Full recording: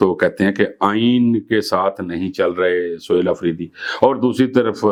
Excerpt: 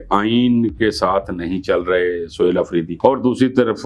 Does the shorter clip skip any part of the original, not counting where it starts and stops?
yes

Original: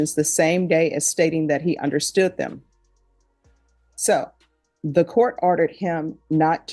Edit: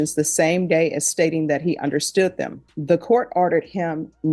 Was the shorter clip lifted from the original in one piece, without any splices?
no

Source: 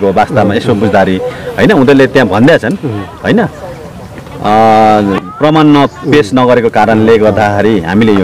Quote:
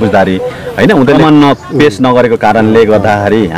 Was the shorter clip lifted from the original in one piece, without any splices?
no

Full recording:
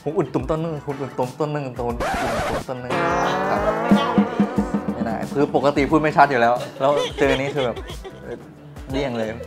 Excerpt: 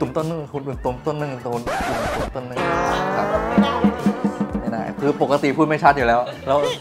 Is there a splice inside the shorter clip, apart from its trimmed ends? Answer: no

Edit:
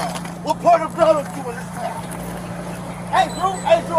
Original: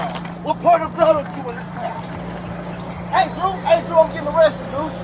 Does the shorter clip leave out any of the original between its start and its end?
no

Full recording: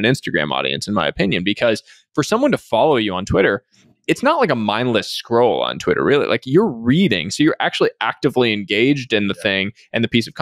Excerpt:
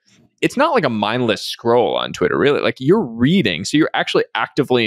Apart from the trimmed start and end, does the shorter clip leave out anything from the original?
no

